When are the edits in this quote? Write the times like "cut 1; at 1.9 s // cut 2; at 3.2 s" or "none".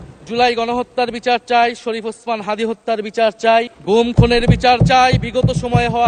none